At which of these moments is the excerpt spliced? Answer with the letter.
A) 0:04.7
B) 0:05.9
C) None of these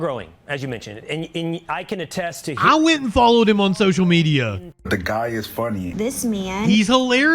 A